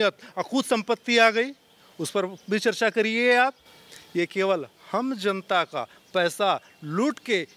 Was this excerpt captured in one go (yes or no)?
yes